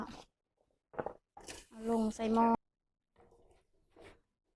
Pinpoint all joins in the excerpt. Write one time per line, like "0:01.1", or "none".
0:02.6